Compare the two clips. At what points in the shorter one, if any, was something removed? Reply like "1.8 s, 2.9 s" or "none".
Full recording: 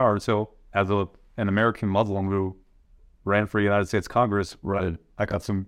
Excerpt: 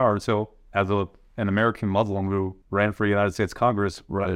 2.6 s